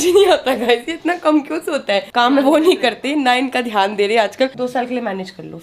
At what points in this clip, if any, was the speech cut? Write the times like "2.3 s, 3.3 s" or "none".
2.1 s, 4.5 s